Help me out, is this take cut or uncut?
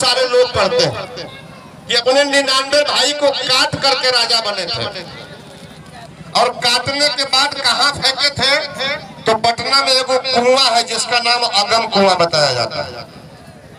uncut